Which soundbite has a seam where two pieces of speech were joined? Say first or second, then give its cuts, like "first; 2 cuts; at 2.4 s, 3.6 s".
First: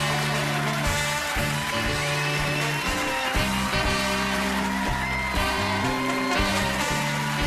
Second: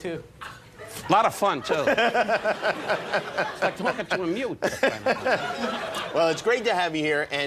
first; 1 cut; at 3.4 s